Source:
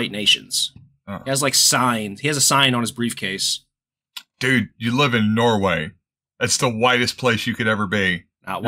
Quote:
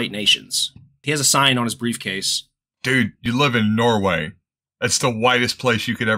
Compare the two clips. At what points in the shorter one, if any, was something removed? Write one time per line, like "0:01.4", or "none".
0:01.0
0:03.2